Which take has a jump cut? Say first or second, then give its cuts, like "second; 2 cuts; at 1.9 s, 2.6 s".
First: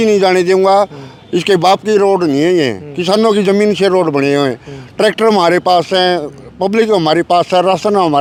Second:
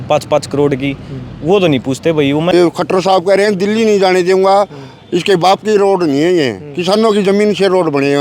second; 1 cut; at 2.5 s